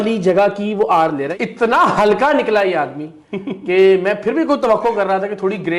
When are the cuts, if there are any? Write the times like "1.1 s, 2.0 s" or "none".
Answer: 1.3 s